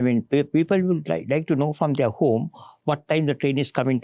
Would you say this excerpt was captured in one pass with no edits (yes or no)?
yes